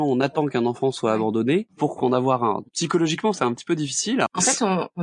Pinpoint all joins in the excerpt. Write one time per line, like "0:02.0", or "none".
0:01.7
0:02.6
0:04.3